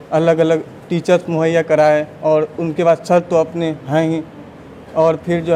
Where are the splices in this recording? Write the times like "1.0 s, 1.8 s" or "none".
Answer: none